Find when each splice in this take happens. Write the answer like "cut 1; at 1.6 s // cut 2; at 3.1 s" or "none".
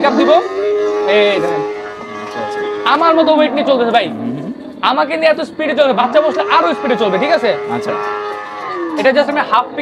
none

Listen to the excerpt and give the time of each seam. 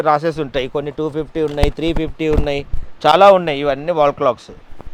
none

